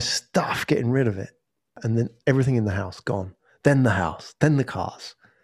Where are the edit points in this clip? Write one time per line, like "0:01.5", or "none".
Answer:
0:01.8